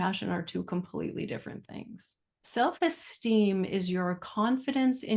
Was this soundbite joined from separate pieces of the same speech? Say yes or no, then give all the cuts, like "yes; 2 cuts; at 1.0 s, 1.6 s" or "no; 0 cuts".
no; 0 cuts